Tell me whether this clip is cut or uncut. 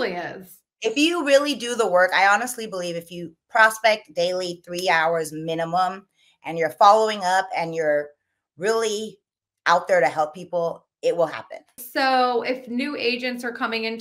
cut